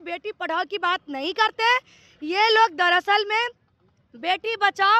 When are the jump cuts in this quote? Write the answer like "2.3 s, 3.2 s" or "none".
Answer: none